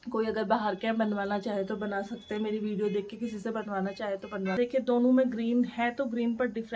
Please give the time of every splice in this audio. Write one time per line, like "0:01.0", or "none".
0:04.6